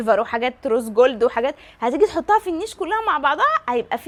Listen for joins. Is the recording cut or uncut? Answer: uncut